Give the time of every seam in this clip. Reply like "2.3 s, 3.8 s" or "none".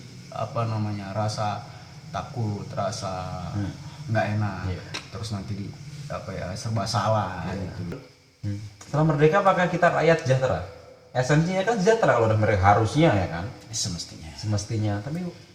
8.0 s